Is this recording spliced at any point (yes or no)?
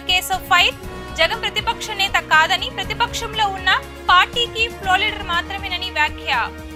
no